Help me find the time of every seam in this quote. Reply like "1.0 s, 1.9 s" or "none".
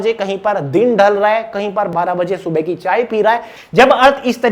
1.9 s, 3.6 s